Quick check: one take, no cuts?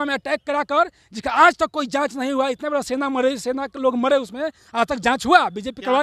yes; 0 cuts

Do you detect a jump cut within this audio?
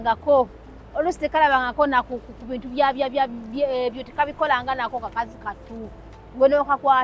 no; 0 cuts

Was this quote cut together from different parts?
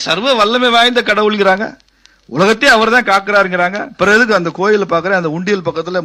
no; 0 cuts

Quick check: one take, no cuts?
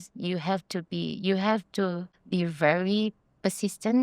no; 1 cut; at 2.1 s

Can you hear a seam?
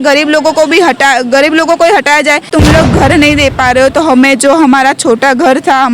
yes; 1 cut; at 2.5 s

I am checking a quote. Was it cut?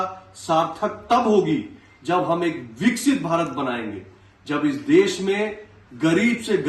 no; 0 cuts

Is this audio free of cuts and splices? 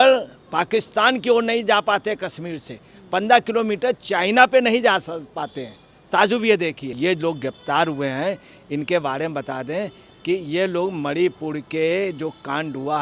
no; 1 cut; at 6.9 s

